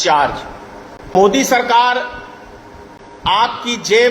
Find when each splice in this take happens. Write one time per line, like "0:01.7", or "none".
0:01.1

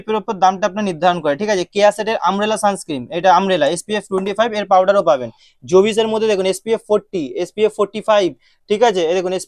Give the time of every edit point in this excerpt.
none

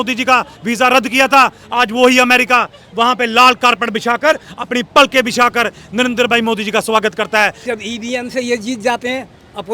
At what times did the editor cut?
0:07.6

